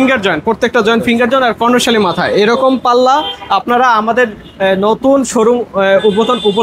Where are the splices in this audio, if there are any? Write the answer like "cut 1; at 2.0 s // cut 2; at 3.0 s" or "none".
none